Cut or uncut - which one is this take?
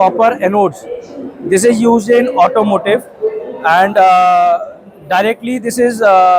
uncut